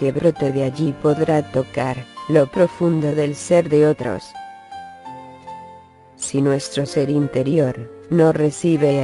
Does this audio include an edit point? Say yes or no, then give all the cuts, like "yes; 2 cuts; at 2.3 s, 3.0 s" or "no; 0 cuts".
yes; 1 cut; at 2.1 s